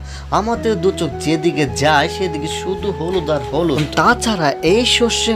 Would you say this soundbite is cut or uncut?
uncut